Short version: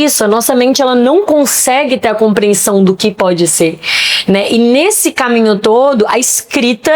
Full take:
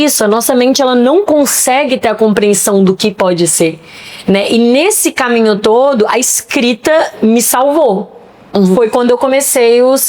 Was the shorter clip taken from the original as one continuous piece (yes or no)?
yes